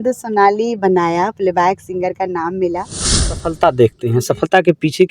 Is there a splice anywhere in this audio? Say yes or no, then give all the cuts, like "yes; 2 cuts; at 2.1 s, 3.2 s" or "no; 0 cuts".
yes; 1 cut; at 3.4 s